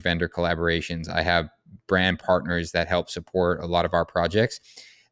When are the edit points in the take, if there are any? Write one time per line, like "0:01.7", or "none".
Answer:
0:02.2